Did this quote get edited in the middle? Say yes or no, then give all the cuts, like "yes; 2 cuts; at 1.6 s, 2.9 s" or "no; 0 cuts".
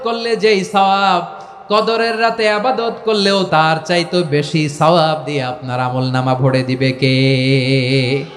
yes; 1 cut; at 3.5 s